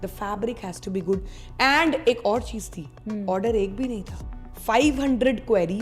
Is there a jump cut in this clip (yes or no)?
no